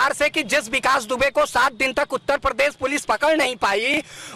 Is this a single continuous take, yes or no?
yes